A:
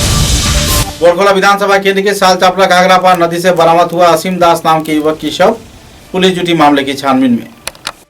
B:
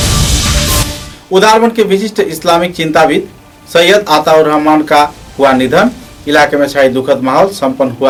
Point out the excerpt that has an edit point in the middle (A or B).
A